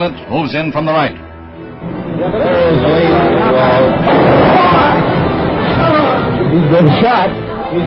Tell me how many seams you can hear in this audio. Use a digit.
0